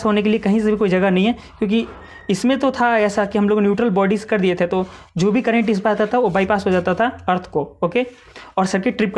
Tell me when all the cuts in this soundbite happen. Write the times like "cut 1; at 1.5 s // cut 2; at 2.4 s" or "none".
none

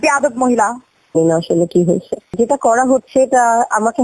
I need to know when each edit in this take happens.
cut 1; at 1.2 s

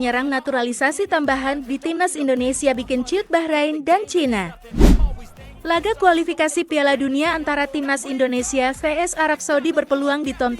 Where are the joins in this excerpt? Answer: cut 1; at 4.6 s

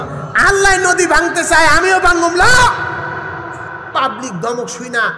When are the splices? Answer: cut 1; at 3.8 s

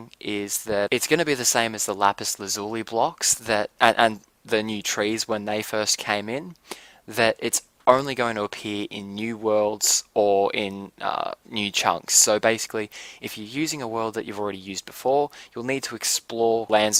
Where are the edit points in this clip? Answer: none

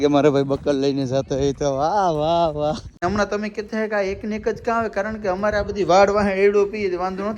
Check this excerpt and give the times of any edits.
cut 1; at 2.9 s

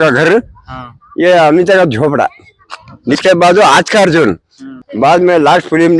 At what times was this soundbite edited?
cut 1; at 3.2 s // cut 2; at 4.7 s

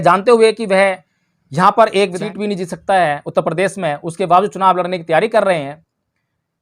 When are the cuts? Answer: cut 1; at 2.2 s

